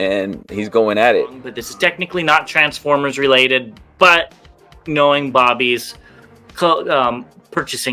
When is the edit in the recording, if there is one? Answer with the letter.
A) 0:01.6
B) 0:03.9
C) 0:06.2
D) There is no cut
A